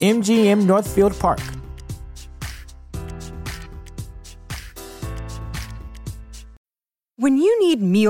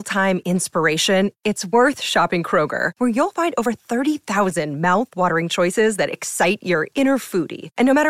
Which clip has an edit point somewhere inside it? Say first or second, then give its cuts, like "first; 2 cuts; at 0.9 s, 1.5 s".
first; 1 cut; at 6.5 s